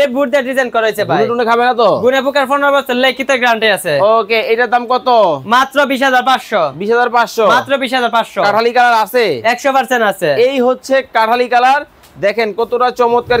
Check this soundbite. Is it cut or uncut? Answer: uncut